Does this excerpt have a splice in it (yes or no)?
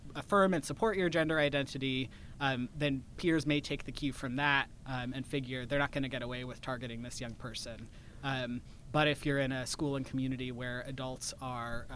no